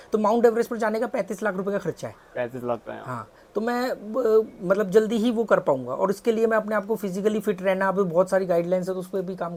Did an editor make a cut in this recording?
no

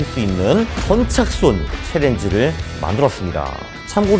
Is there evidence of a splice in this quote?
no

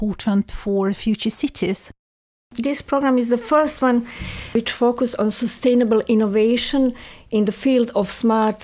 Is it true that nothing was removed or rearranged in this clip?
no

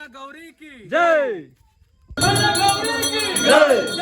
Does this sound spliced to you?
yes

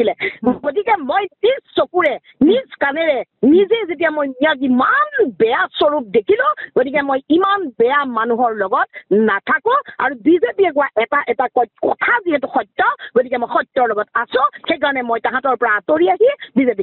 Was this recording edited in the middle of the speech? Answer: no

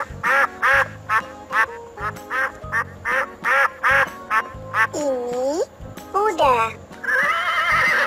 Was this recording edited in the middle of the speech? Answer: no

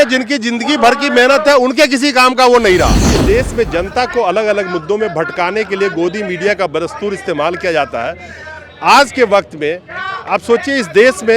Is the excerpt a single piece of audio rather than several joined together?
no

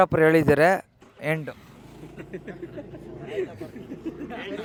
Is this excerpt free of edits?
yes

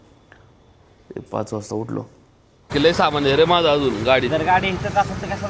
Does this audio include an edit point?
yes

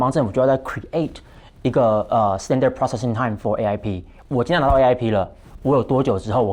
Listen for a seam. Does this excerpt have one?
no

